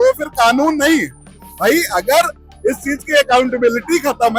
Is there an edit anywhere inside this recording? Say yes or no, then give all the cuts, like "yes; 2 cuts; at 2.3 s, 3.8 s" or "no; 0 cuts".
no; 0 cuts